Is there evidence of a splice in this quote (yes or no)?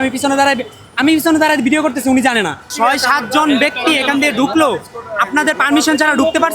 yes